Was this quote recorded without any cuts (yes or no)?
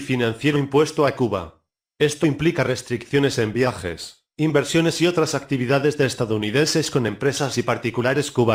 yes